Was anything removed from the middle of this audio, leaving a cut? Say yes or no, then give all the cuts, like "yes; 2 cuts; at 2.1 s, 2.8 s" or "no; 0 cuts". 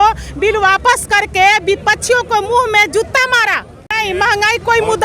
yes; 1 cut; at 4.0 s